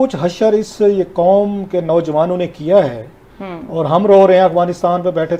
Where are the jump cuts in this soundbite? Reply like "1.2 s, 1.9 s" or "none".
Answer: none